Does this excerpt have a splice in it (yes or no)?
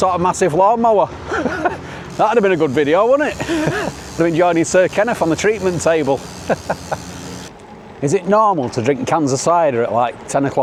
no